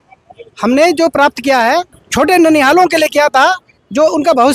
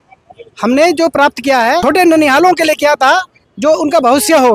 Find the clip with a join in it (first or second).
second